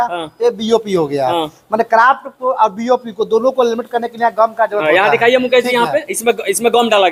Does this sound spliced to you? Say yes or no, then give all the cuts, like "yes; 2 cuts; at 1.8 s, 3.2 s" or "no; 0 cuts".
no; 0 cuts